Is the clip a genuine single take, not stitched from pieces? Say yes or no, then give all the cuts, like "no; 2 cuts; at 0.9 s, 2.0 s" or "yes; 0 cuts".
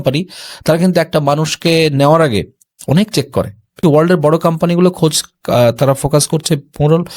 no; 1 cut; at 3.8 s